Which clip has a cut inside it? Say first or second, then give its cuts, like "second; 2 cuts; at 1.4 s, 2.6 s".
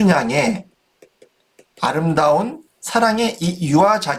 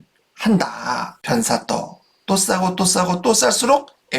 second; 1 cut; at 1.1 s